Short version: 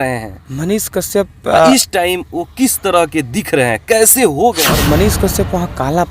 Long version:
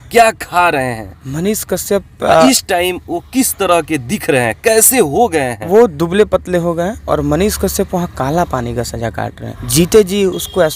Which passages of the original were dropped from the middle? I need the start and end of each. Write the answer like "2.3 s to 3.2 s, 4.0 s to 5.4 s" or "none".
5.5 s to 7.1 s